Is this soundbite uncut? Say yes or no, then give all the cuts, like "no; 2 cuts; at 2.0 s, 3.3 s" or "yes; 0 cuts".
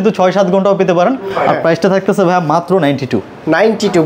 yes; 0 cuts